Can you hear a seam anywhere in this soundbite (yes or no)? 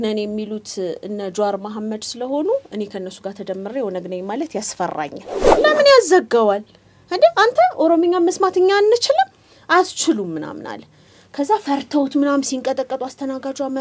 yes